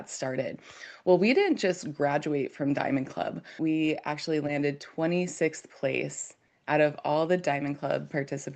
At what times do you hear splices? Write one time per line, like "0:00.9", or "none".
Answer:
0:03.6